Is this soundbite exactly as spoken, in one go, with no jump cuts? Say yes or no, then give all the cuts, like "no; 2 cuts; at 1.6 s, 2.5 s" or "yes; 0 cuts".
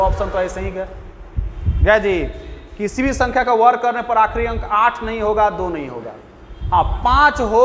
yes; 0 cuts